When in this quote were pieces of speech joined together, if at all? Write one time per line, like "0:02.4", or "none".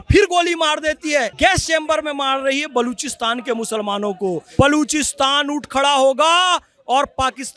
0:01.3
0:04.4